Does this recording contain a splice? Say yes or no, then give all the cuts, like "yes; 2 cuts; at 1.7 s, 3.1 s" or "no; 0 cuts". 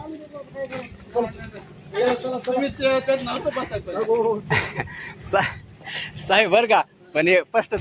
no; 0 cuts